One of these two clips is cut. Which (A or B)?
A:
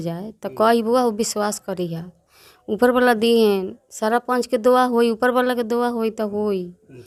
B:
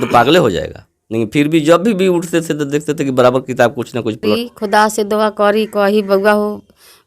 B